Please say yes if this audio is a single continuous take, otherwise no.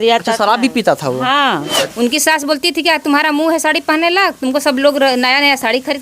no